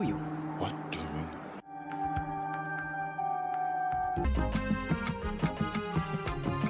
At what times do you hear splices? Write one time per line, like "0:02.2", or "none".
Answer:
0:04.3